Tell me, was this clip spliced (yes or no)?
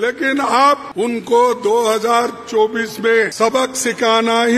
yes